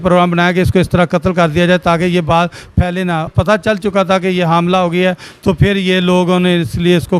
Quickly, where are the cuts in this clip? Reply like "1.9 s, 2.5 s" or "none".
3.3 s